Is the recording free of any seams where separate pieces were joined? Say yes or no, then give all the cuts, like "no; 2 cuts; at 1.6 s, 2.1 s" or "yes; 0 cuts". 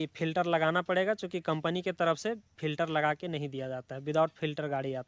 yes; 0 cuts